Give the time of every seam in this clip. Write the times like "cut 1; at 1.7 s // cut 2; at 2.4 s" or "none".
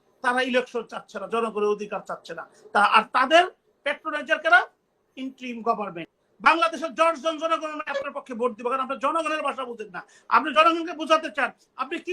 cut 1; at 6.2 s

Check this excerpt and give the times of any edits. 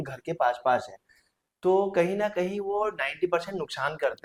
none

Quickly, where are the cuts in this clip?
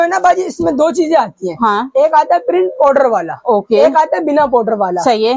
none

